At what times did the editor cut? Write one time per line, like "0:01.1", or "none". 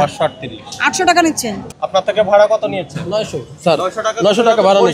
0:01.7